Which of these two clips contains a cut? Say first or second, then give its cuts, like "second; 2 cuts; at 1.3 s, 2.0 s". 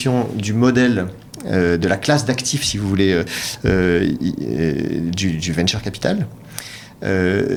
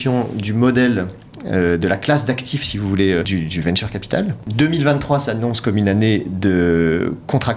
second; 2 cuts; at 3.3 s, 4.5 s